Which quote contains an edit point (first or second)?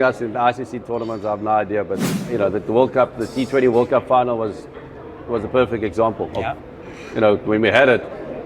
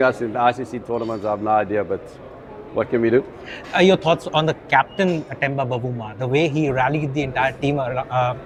first